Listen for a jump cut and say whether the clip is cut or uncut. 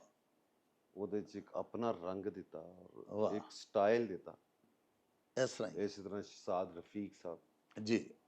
uncut